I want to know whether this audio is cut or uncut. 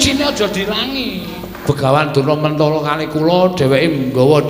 cut